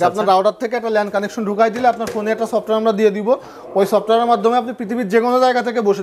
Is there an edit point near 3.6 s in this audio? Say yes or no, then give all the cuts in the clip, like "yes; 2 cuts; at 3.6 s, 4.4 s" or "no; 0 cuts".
no; 0 cuts